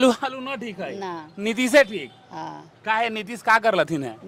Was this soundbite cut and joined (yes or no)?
no